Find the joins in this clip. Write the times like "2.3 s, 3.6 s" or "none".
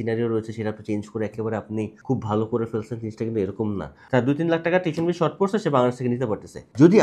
2.0 s, 4.0 s